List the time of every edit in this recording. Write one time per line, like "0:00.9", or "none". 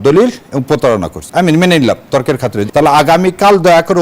0:01.2
0:02.6